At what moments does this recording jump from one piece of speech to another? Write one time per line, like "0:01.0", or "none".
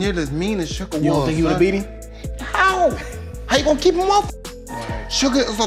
none